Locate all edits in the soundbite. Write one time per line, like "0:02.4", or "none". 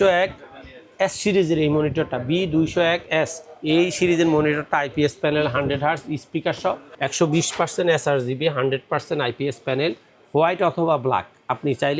0:06.9